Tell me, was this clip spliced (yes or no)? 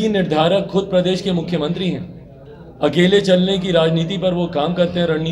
no